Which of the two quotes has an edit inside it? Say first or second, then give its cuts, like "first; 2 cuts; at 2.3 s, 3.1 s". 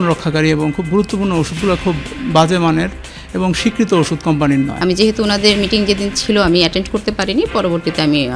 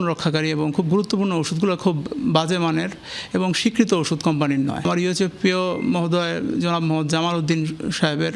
first; 1 cut; at 4.7 s